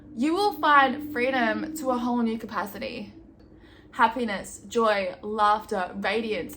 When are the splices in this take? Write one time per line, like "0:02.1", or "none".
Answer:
0:03.3

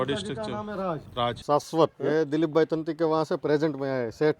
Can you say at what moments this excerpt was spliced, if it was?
0:01.1
0:02.0

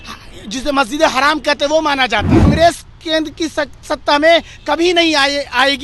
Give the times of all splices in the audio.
0:02.5

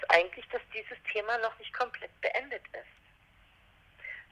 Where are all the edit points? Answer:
none

